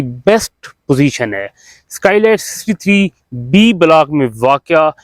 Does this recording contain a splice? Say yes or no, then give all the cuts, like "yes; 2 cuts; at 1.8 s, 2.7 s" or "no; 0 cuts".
no; 0 cuts